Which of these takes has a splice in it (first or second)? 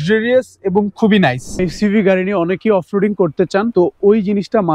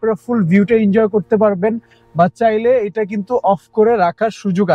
first